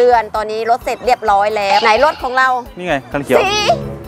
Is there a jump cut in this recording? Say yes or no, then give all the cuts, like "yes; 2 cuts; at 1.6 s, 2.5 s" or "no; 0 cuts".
yes; 1 cut; at 1.8 s